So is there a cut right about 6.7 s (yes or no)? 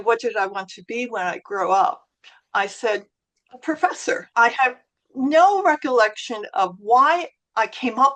no